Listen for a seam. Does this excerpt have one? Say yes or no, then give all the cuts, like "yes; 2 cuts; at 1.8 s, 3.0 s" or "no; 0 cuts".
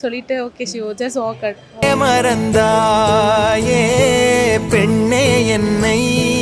no; 0 cuts